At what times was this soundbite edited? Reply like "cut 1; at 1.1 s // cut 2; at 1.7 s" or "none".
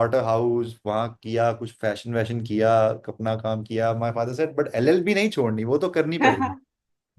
none